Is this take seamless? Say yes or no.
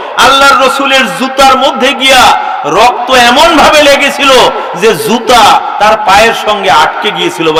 yes